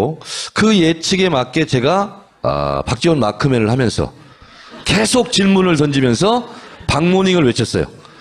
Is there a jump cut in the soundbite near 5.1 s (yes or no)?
yes